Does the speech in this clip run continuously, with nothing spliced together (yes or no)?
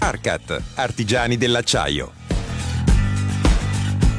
no